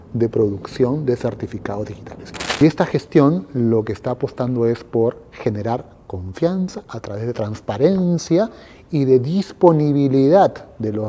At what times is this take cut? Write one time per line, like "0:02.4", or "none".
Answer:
0:02.6